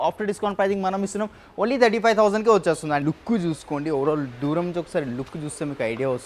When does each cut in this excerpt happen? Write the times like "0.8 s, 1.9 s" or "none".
3.0 s